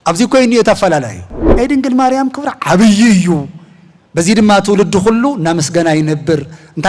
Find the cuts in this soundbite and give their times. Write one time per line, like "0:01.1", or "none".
0:01.4